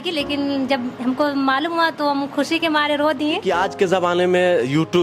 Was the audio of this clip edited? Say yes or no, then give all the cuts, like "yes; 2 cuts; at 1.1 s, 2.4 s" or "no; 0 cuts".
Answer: yes; 1 cut; at 3.4 s